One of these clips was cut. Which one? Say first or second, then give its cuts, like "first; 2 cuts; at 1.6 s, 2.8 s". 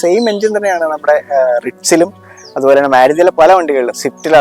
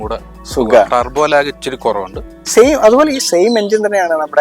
second; 1 cut; at 2.3 s